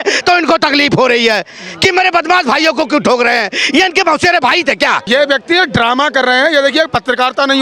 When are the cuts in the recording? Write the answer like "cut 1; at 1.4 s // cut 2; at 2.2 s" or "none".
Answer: cut 1; at 5.0 s